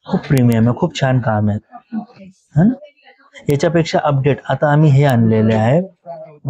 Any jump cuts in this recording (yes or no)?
no